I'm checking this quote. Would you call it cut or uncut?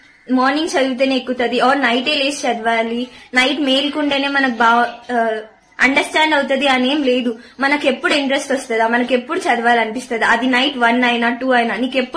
uncut